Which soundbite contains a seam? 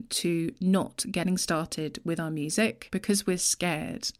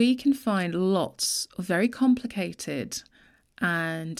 first; 1 cut; at 2.8 s

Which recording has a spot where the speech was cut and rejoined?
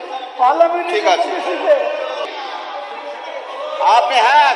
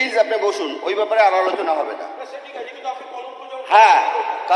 first; 1 cut; at 2.3 s

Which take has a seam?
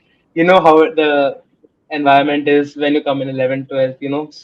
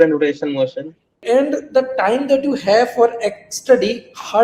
second; 1 cut; at 1.2 s

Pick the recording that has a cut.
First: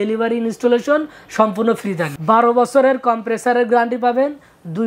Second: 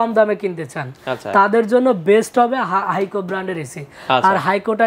first; 1 cut; at 2.1 s

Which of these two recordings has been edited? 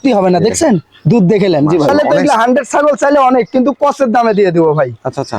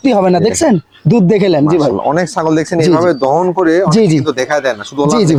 first; 1 cut; at 1.9 s

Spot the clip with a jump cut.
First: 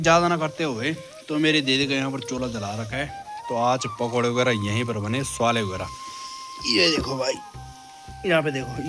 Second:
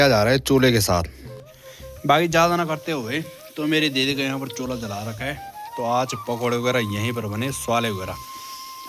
second; 1 cut; at 1.3 s

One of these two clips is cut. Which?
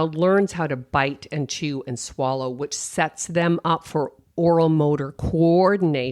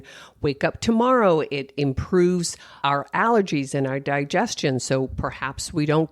second; 1 cut; at 2.8 s

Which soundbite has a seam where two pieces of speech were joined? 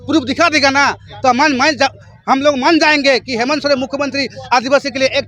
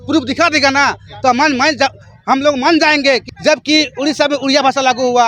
second; 1 cut; at 3.3 s

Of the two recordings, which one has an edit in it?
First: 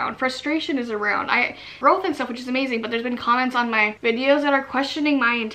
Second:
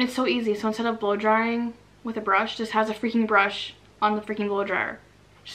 first; 1 cut; at 1.7 s

